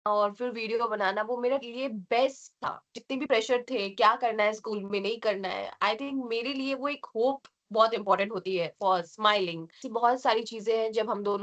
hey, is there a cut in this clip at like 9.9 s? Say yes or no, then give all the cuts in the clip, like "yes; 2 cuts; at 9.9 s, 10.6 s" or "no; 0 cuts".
yes; 1 cut; at 9.9 s